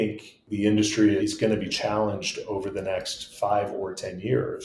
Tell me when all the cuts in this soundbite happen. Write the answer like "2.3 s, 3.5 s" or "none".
1.2 s